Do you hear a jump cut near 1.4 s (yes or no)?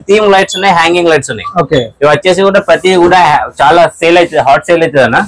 no